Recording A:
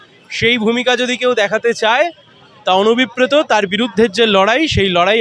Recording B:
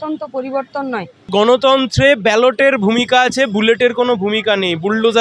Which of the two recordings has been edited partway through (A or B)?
B